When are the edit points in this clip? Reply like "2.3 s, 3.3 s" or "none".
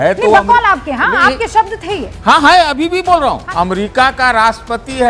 3.4 s